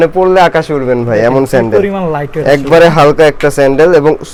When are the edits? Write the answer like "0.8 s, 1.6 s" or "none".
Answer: none